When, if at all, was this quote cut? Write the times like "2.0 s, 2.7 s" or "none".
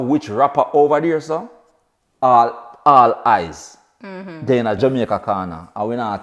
4.8 s